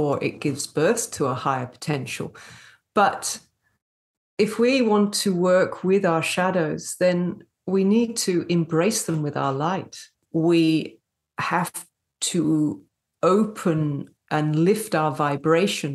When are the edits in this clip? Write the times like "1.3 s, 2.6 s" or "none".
10.2 s